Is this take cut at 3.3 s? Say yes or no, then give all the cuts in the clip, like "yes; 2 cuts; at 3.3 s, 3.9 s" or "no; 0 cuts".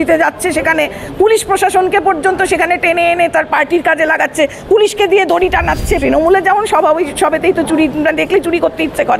no; 1 cut; at 6.0 s